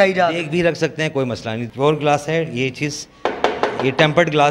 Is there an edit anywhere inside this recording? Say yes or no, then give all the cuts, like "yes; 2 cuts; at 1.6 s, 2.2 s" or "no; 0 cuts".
yes; 1 cut; at 1.6 s